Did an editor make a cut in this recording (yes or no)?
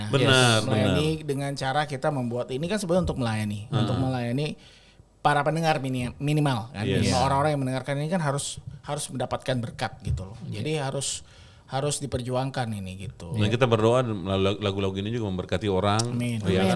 no